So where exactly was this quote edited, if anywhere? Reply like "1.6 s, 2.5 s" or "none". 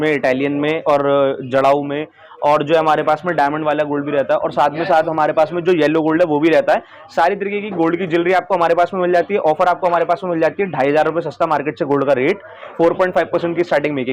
none